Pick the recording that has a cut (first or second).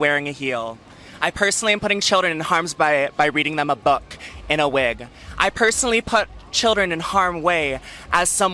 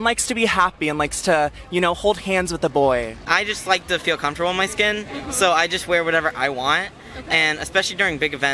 second